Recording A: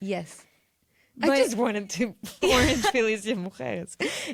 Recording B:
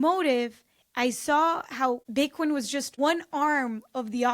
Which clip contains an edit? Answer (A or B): B